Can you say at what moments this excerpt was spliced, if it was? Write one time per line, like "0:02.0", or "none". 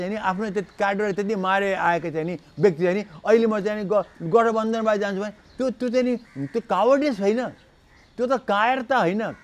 none

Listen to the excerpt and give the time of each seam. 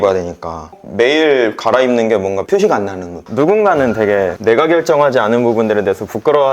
0:03.3

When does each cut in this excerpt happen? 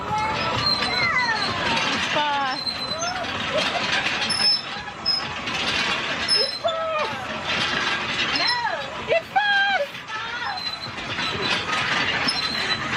none

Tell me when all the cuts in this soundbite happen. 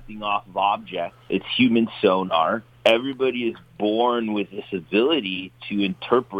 0:01.2
0:02.7

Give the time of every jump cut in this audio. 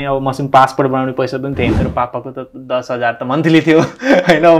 0:01.8

